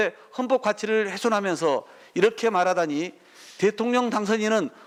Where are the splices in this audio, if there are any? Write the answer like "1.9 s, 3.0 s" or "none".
none

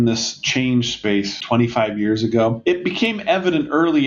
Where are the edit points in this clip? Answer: 1.4 s, 2.6 s

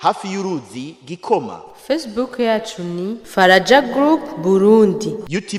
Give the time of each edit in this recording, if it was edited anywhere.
none

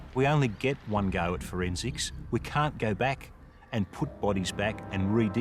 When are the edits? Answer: none

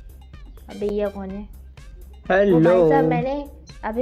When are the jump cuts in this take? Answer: none

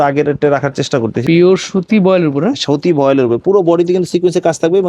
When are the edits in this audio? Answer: 1.2 s

